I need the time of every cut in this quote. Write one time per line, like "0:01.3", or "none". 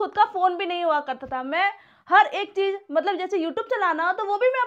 none